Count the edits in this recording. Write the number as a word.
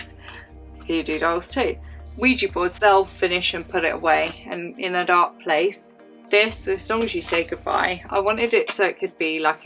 zero